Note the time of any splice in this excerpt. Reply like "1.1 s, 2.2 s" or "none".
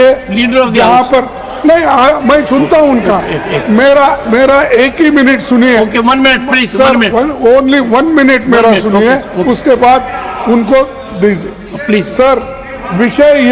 none